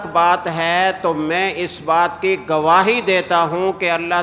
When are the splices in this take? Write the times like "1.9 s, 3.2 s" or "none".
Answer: none